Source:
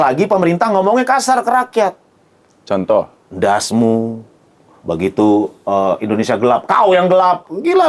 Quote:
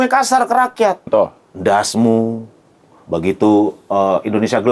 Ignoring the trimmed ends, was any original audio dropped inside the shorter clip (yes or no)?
yes